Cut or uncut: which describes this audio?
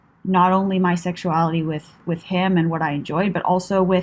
uncut